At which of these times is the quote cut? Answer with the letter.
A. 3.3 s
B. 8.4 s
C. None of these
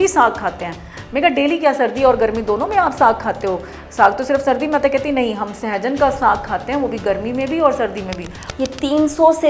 B